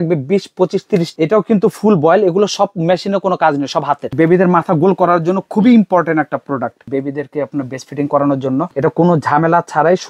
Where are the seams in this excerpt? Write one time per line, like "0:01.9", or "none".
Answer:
0:01.1
0:04.0
0:06.8
0:08.7